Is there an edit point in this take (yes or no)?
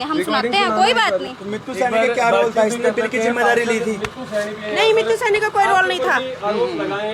no